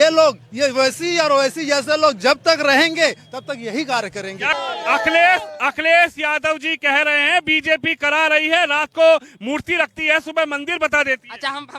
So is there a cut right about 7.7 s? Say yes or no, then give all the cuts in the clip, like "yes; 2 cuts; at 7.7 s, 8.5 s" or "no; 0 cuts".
no; 1 cut; at 4.5 s